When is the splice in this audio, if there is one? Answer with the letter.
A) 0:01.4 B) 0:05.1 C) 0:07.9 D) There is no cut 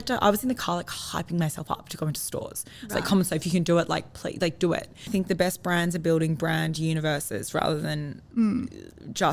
B